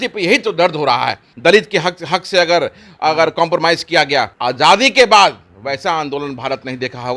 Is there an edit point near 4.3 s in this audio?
yes; 2 cuts; at 1.2 s, 4.3 s

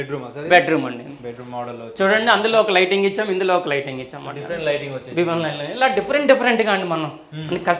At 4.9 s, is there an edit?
no; 0 cuts

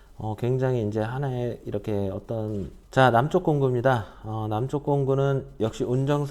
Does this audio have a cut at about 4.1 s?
no; 1 cut; at 2.8 s

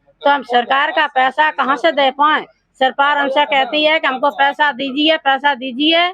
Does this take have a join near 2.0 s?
no; 0 cuts

